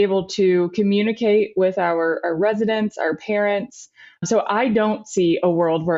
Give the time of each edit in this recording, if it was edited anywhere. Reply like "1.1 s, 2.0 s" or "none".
4.2 s